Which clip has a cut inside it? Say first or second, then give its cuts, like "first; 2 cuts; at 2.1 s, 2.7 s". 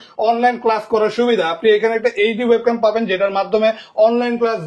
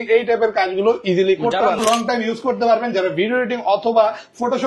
second; 1 cut; at 1.8 s